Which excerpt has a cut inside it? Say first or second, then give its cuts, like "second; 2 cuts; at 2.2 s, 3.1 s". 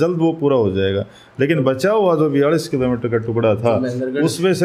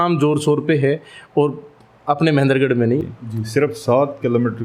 second; 1 cut; at 3.0 s